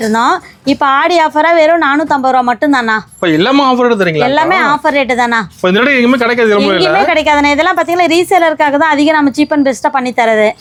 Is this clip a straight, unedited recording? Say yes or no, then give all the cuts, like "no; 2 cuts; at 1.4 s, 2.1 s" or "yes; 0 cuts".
yes; 0 cuts